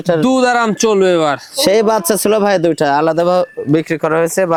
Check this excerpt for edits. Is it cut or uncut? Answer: uncut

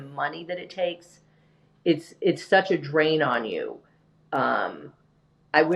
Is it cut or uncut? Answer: uncut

